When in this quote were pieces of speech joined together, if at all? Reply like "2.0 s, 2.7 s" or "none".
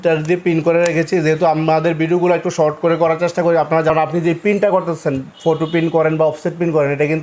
3.9 s